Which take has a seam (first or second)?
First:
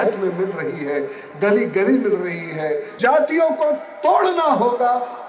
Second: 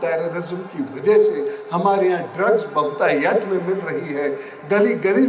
first